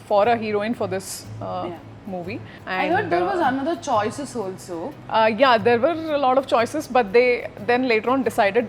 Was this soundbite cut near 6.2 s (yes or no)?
no